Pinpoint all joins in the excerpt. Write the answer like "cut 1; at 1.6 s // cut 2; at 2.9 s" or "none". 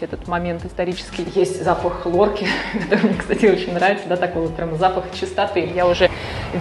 cut 1; at 1.3 s // cut 2; at 5.8 s